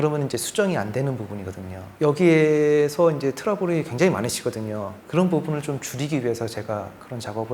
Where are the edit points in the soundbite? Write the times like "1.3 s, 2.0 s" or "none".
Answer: 5.0 s